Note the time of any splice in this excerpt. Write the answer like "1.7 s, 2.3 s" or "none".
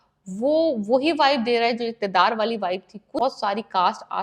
3.2 s